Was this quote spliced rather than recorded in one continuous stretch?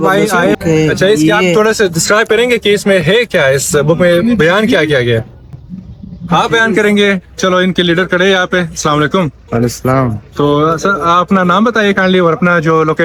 no; 0 cuts

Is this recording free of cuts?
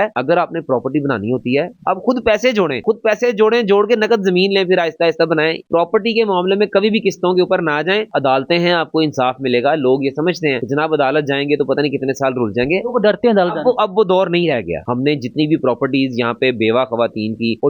no; 4 cuts; at 1.8 s, 5.6 s, 8.1 s, 14.8 s

